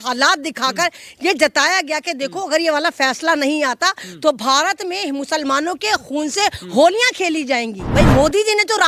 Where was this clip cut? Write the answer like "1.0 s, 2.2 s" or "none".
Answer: 7.8 s

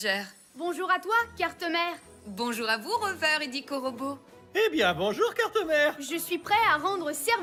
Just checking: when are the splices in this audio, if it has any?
none

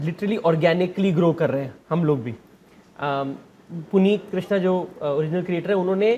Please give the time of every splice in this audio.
none

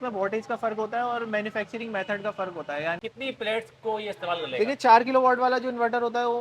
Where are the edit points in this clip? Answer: 3.0 s

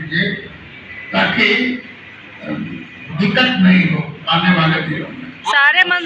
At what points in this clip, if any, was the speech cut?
none

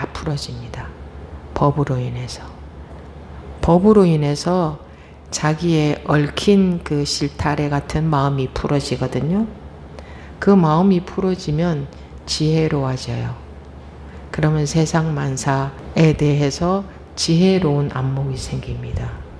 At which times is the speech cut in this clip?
15.8 s

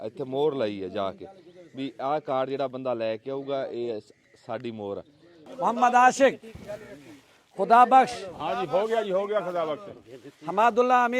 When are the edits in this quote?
5.5 s

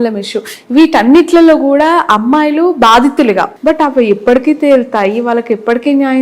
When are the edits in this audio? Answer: 3.5 s

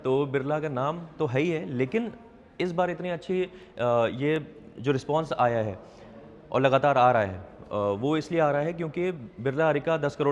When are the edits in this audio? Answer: none

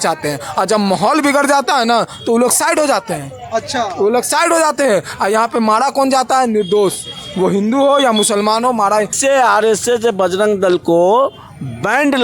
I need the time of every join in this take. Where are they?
9.1 s

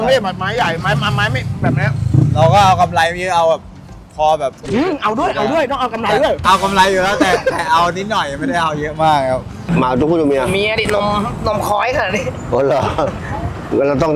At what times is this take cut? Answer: 9.5 s

